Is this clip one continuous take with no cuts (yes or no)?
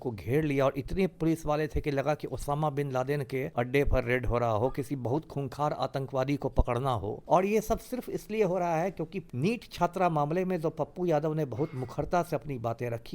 no